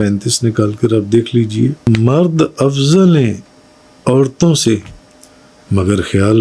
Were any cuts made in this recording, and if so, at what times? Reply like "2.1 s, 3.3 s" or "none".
1.8 s